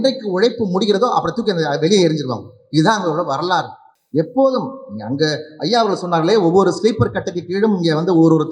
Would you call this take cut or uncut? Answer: uncut